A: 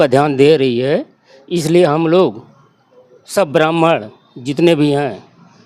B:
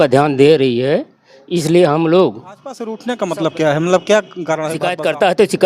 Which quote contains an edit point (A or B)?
B